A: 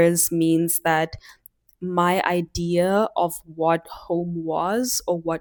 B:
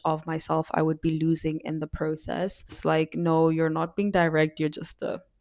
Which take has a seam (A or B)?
B